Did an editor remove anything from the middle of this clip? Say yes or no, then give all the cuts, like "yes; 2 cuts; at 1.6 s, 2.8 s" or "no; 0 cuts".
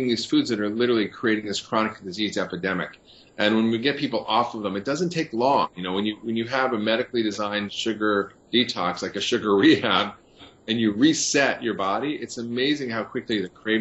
no; 0 cuts